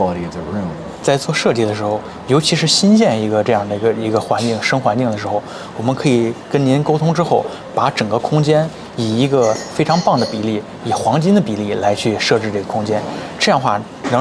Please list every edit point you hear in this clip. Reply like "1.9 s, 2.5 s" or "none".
none

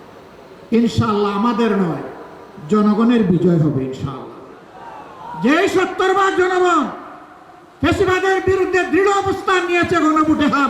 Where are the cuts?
none

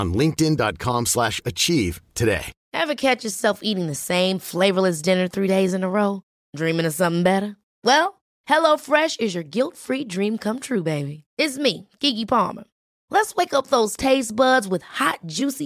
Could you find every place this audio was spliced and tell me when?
2.6 s

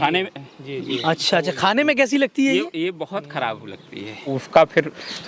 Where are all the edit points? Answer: 4.4 s

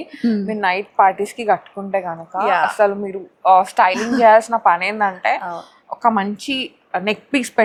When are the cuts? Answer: none

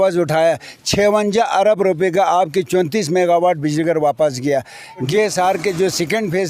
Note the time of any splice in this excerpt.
5.1 s

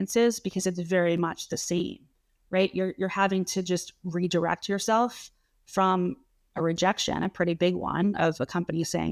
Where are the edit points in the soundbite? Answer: none

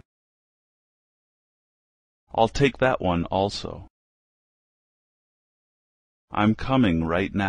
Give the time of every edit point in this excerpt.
none

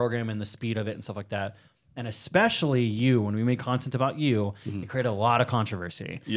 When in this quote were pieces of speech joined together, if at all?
none

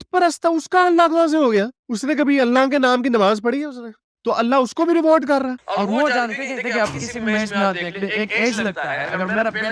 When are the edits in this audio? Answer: none

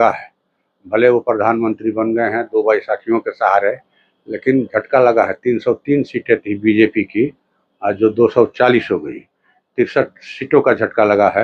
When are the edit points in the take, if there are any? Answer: none

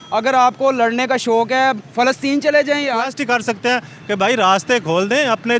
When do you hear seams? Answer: 3.1 s

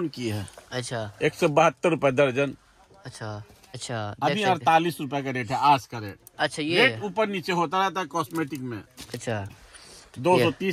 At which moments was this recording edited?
3.7 s, 9.5 s

